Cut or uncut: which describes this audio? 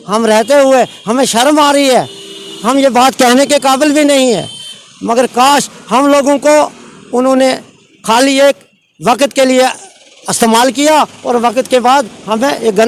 uncut